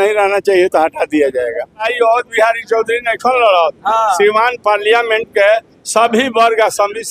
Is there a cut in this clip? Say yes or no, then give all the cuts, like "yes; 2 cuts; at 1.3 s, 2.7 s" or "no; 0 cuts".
yes; 1 cut; at 1.9 s